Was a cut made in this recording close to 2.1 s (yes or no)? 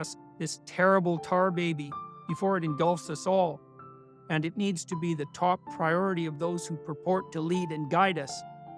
no